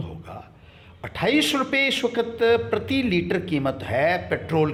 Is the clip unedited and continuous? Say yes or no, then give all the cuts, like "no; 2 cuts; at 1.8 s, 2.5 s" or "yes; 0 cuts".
yes; 0 cuts